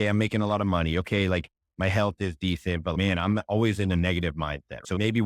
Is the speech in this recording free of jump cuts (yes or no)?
yes